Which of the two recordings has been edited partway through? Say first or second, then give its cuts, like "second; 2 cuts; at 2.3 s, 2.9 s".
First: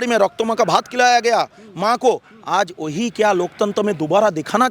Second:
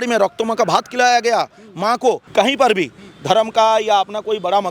second; 1 cut; at 2.2 s